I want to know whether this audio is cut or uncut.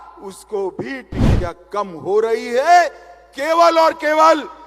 cut